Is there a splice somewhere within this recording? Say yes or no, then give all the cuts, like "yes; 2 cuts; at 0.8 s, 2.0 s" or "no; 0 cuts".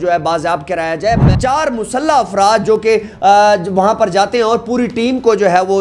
yes; 1 cut; at 1.3 s